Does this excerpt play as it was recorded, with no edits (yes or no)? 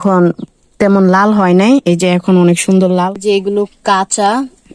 no